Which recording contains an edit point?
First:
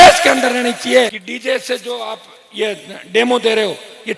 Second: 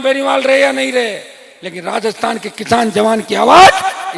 first; 1 cut; at 1.3 s

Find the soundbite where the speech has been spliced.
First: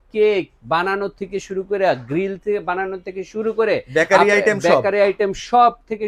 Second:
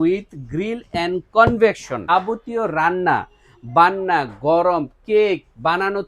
second; 1 cut; at 2.1 s

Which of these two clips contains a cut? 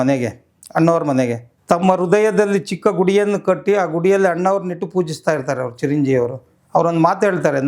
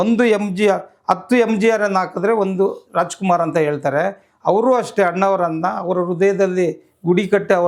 first; 1 cut; at 1.5 s

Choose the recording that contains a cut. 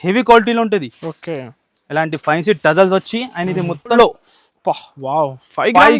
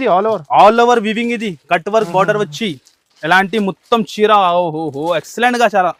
first; 1 cut; at 4.0 s

